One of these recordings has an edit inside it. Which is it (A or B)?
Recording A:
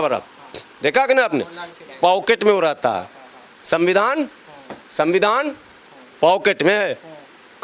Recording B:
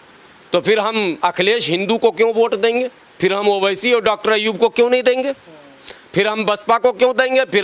B